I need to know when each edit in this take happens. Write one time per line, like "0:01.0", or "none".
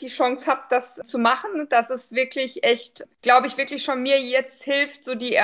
0:01.0
0:03.0